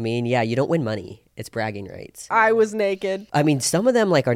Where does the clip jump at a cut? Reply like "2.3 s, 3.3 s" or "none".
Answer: 2.3 s, 3.2 s